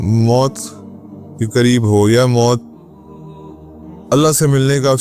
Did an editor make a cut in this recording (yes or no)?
yes